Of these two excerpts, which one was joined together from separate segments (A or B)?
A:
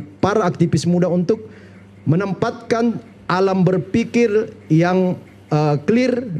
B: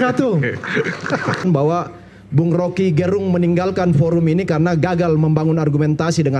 B